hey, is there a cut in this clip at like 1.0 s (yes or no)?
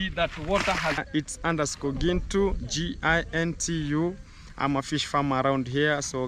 yes